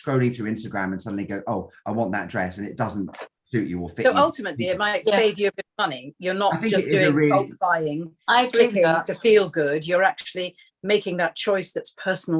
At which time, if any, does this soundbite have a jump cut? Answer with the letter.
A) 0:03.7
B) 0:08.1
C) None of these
C